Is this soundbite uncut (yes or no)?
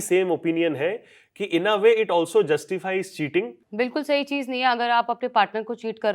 no